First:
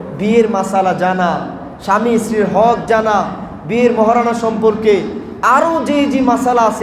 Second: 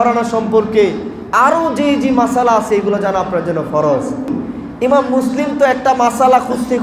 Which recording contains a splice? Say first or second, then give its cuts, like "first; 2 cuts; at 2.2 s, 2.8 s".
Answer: second; 1 cut; at 4.3 s